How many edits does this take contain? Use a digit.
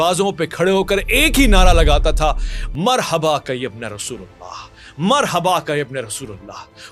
0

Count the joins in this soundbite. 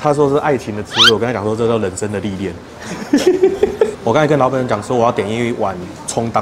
1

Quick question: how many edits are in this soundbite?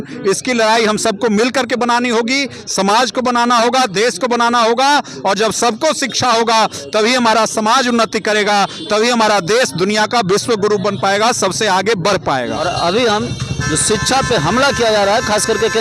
1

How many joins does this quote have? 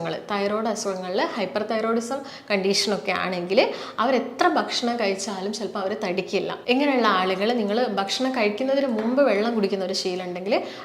1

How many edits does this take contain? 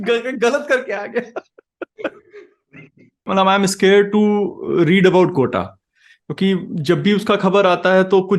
1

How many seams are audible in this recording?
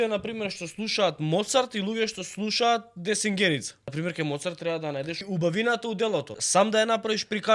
3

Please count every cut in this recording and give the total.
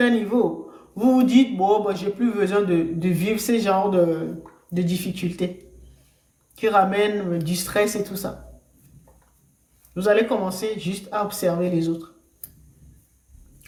0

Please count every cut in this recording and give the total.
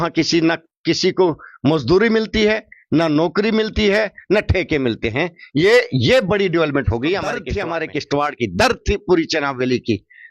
1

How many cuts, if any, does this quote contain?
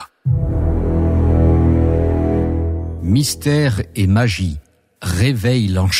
1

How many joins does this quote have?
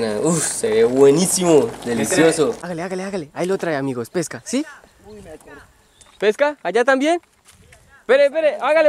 1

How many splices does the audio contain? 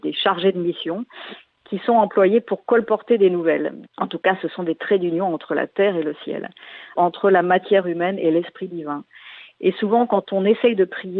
2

